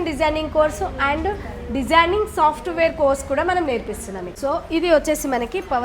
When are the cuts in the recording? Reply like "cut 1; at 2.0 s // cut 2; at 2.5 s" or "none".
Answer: cut 1; at 4.3 s